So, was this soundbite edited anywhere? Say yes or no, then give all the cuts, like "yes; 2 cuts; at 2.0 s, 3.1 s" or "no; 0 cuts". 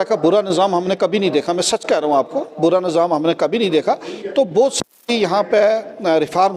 no; 0 cuts